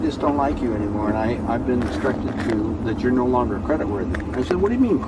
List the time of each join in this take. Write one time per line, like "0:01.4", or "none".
none